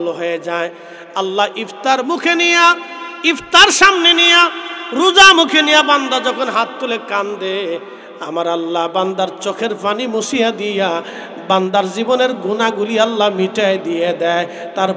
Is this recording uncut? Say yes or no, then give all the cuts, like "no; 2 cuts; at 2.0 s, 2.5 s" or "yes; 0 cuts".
yes; 0 cuts